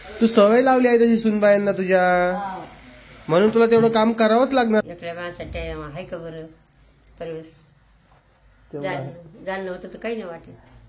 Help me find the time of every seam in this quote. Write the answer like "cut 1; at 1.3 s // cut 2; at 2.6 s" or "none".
cut 1; at 4.8 s